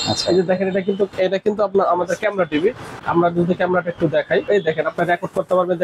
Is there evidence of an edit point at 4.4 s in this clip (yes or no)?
yes